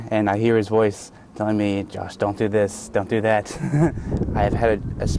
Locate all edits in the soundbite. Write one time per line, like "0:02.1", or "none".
0:04.0